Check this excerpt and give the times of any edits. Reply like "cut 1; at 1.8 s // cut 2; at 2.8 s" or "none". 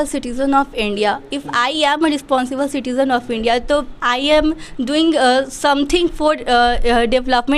none